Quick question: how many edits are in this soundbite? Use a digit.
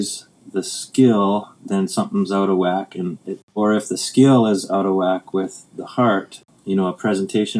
2